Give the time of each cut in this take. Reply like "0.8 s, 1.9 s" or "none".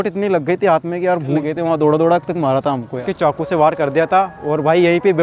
1.4 s, 3.0 s

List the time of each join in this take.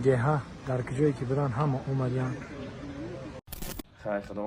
3.4 s

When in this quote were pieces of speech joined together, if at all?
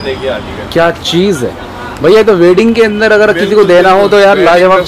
none

